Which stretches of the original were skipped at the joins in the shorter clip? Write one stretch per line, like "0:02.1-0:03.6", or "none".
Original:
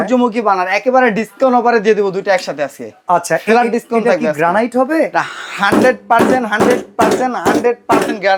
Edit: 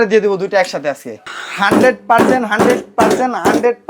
0:03.0-0:05.3

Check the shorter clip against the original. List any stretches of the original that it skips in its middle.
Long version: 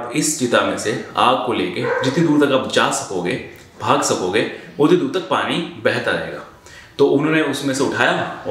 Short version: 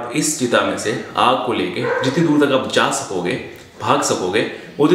none

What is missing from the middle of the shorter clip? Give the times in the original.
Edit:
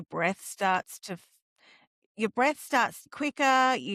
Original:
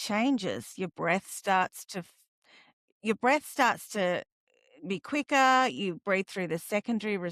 0:03.9-0:05.0

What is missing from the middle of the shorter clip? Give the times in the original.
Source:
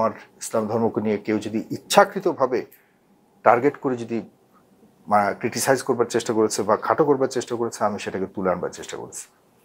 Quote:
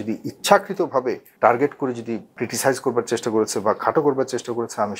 0:02.7-0:03.3
0:04.4-0:05.4

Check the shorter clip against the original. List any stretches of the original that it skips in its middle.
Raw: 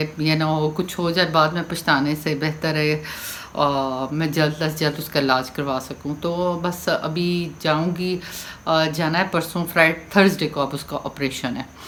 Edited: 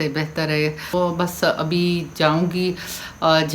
0:03.2-0:06.4

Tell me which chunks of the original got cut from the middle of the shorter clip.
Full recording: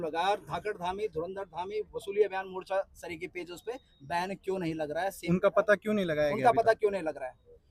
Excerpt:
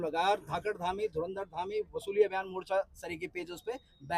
none

